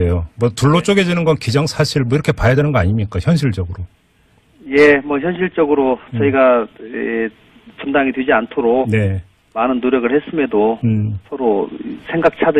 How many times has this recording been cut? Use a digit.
1